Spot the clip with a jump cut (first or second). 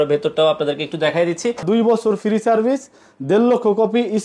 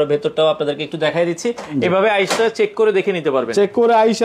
first